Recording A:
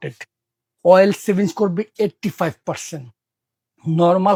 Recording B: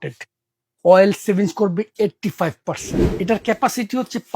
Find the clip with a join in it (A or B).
B